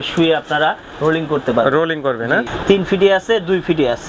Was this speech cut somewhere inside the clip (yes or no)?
yes